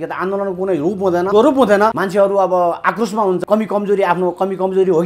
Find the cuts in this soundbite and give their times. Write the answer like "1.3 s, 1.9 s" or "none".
1.3 s, 2.0 s, 3.4 s